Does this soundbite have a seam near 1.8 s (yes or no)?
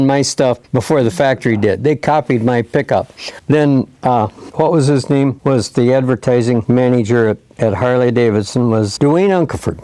no